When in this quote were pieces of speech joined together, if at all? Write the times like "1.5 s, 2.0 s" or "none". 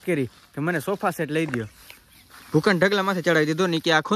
none